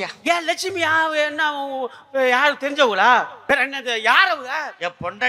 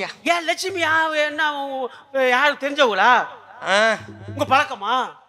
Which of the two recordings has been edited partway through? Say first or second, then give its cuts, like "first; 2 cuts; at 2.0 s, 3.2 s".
first; 1 cut; at 3.4 s